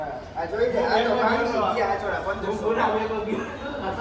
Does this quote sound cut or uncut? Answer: uncut